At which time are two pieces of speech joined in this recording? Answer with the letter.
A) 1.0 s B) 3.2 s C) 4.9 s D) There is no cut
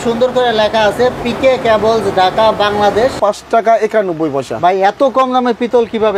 B